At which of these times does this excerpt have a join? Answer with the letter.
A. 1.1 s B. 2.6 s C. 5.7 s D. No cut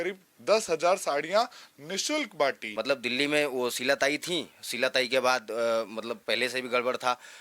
B